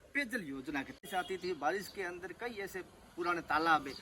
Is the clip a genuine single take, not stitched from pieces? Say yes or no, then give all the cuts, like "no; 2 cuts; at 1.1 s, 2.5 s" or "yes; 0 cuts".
no; 1 cut; at 1.0 s